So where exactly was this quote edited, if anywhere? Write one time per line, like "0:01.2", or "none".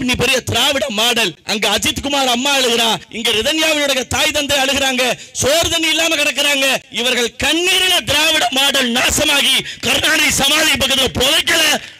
0:01.4
0:03.1
0:06.9